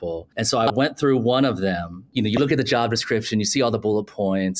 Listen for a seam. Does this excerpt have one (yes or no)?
yes